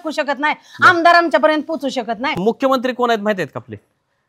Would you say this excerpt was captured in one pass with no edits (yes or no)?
no